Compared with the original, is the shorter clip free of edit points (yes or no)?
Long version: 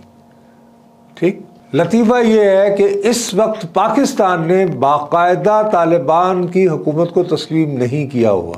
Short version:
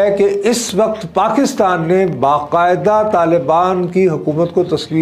yes